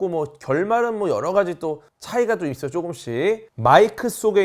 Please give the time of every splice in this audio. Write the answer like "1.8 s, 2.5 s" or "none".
3.5 s

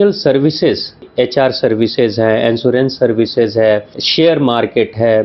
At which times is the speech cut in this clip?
1.1 s, 4.0 s

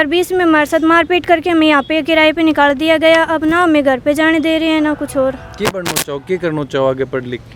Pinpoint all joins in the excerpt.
none

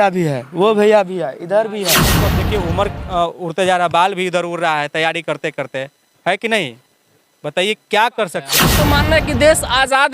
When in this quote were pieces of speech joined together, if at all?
2.3 s, 8.8 s

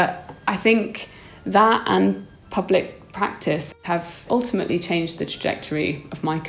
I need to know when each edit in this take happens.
3.7 s

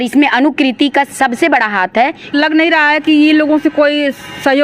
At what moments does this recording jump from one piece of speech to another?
2.3 s

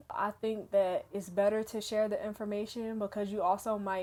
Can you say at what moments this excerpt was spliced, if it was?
none

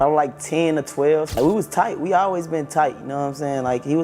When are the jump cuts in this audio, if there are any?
1.4 s

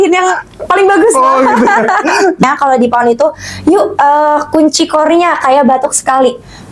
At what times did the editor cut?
2.4 s

